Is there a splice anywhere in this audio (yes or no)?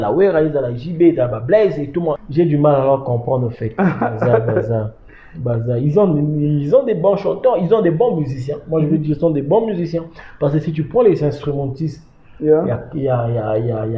yes